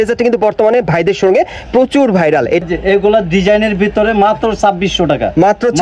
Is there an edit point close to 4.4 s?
no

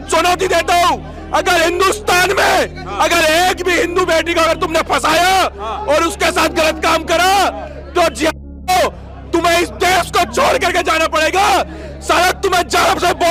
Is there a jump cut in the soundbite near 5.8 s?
no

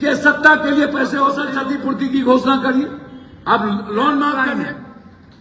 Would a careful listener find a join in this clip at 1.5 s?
yes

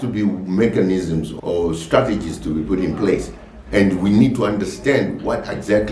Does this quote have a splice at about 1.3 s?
yes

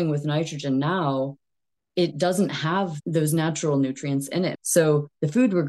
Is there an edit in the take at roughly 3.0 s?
yes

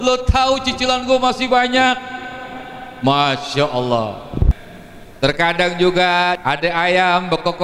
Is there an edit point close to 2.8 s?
no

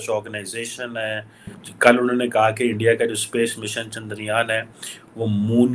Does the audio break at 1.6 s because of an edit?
yes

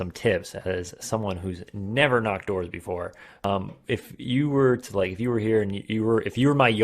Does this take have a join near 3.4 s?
yes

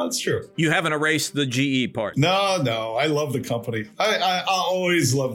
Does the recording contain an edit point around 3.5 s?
no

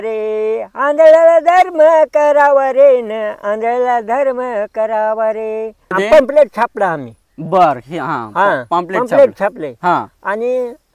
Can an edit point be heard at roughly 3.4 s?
no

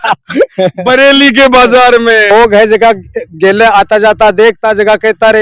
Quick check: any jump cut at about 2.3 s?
yes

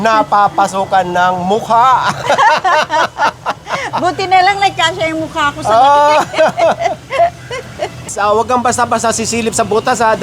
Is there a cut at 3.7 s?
no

